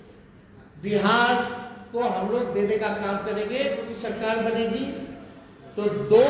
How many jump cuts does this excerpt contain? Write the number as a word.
one